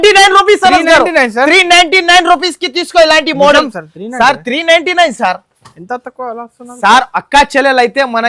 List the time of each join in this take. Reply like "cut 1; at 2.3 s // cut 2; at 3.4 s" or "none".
none